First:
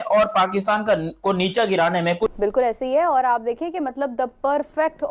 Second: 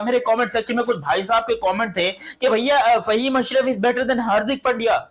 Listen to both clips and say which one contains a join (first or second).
first